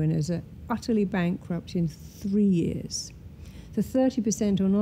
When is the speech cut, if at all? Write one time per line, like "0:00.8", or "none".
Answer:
none